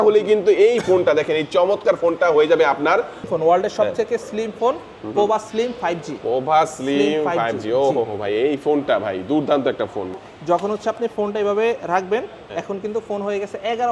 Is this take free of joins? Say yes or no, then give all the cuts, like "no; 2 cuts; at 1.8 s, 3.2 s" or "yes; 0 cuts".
no; 2 cuts; at 3.3 s, 10.1 s